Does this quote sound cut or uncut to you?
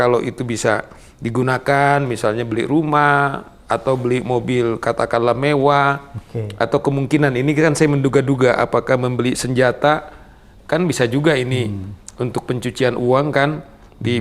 uncut